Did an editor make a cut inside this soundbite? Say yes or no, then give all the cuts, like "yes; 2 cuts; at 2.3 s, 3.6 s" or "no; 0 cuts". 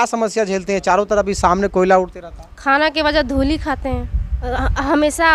no; 0 cuts